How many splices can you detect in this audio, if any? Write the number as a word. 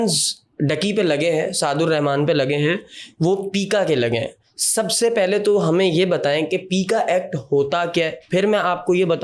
zero